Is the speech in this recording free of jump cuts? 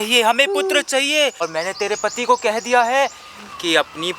no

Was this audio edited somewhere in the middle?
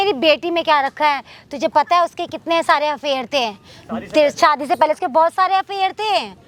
no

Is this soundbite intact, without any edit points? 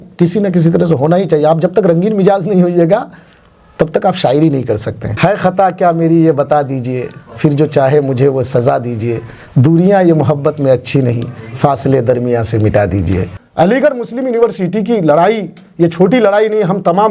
no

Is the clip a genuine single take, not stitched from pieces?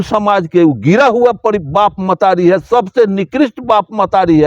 yes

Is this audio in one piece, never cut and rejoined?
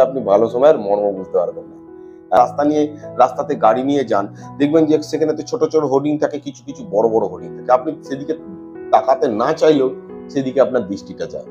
no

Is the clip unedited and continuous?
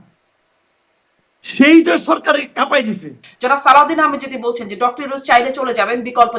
no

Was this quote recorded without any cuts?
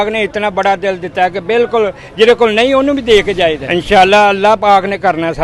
no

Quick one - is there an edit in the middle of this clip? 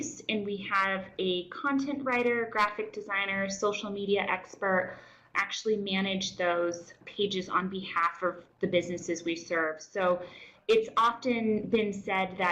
yes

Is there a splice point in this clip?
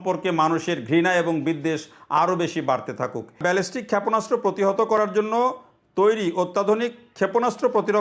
yes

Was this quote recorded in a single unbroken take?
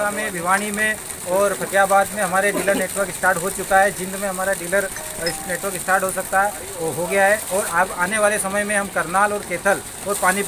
yes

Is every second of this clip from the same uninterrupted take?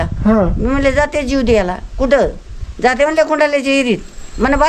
yes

